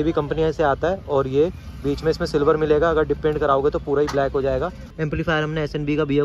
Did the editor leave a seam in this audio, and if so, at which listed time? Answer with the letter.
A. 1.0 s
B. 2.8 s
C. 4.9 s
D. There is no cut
C